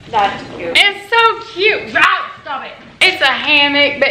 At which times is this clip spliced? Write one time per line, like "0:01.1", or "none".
0:02.8